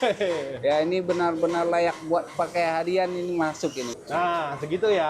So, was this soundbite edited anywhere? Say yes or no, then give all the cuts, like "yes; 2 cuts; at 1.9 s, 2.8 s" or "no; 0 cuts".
yes; 1 cut; at 3.9 s